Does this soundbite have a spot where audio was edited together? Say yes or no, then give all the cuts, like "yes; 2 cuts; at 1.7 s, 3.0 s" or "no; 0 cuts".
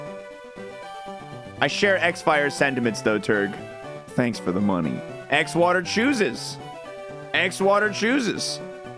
yes; 1 cut; at 1.1 s